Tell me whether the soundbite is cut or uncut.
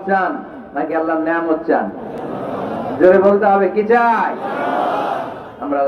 uncut